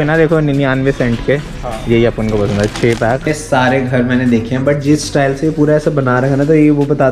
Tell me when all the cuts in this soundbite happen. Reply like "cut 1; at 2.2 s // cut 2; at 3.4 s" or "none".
cut 1; at 3.2 s